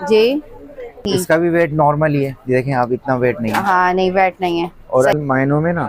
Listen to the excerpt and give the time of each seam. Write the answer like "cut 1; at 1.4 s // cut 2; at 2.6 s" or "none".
cut 1; at 1.1 s // cut 2; at 5.1 s